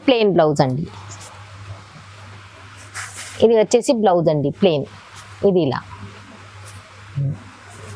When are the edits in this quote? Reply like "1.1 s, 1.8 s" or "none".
none